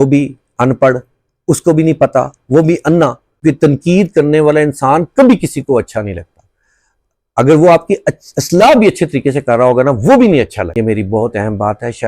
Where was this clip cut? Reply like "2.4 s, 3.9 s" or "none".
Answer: 3.3 s, 10.6 s

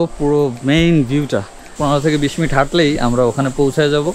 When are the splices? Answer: 1.7 s

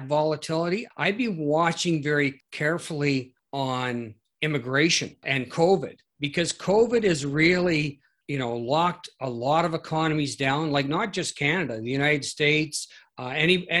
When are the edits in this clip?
0.9 s, 2.5 s, 3.4 s, 4.2 s, 5.2 s, 8.1 s

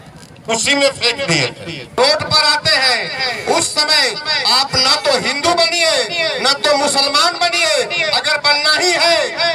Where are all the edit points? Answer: 2.0 s

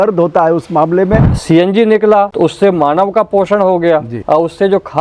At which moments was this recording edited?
1.3 s, 2.3 s, 4.1 s

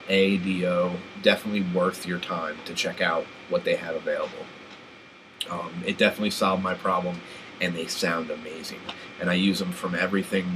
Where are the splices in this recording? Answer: none

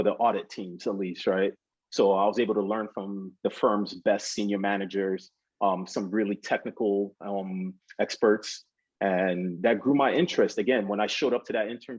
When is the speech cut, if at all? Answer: none

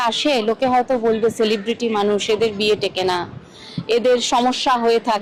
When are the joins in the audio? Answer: none

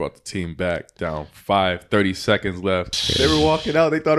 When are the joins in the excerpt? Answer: 3.0 s

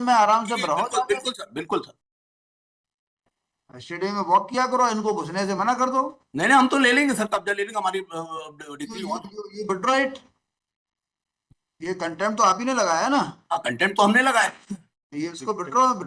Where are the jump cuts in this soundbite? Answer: none

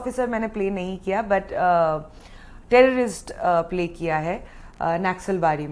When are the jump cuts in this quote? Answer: none

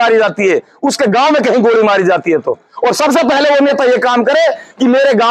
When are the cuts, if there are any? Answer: none

